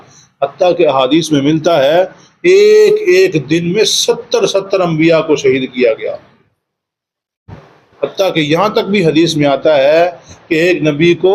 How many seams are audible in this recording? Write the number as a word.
zero